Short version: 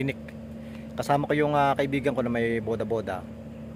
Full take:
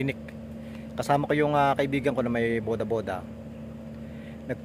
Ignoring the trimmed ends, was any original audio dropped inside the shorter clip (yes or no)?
no